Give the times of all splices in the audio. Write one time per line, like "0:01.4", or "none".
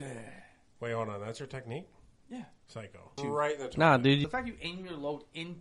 0:03.1
0:04.2